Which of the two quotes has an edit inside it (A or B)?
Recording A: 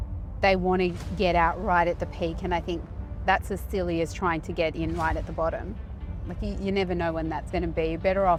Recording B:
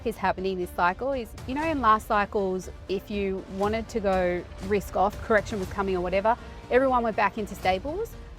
B